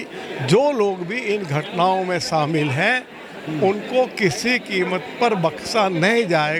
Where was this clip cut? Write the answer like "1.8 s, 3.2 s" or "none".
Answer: none